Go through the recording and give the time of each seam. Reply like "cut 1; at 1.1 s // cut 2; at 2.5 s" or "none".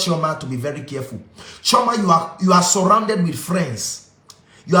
none